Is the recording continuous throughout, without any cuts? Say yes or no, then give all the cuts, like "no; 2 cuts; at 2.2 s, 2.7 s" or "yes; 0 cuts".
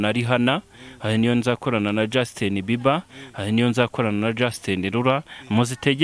yes; 0 cuts